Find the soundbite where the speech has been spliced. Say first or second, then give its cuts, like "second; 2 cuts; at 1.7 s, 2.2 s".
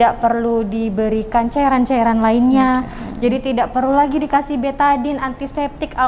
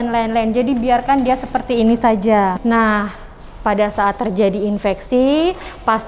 second; 1 cut; at 2.5 s